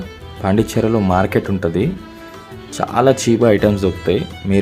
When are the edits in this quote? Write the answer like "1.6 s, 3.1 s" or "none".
none